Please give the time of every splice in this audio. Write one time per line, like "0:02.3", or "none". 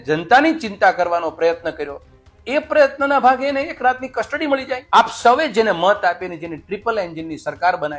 0:04.8